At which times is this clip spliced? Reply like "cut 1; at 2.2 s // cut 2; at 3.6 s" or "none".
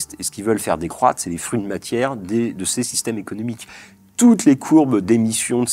cut 1; at 3.7 s

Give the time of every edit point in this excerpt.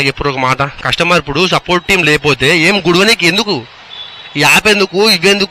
none

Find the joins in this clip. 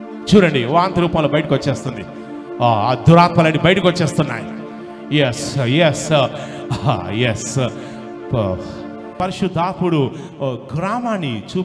cut 1; at 9.1 s

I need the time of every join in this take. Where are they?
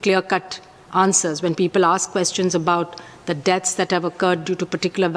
none

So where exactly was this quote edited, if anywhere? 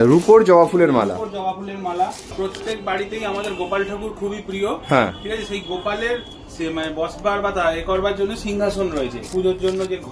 cut 1; at 2.3 s // cut 2; at 9.2 s

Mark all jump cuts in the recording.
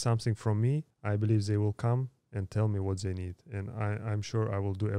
cut 1; at 0.9 s

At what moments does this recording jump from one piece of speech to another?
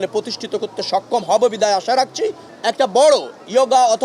cut 1; at 2.5 s

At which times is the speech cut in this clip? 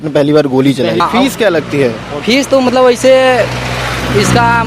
cut 1; at 1.0 s

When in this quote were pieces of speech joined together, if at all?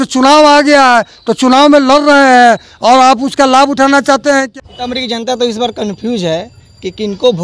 cut 1; at 4.5 s

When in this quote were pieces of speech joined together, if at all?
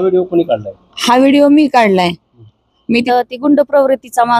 cut 1; at 3.0 s

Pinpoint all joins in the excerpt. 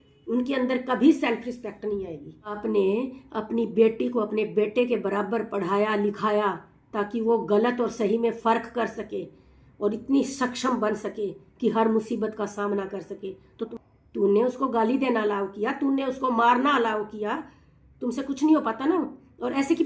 cut 1; at 2.6 s // cut 2; at 13.7 s

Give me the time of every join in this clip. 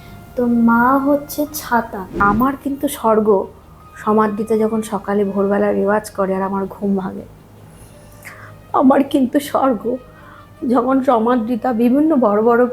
cut 1; at 2.2 s

